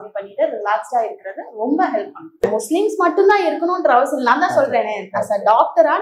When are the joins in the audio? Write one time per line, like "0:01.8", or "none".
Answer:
0:02.4